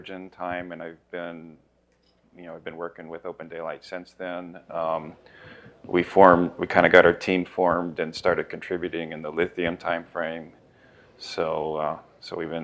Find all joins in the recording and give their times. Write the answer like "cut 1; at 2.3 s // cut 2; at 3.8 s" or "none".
none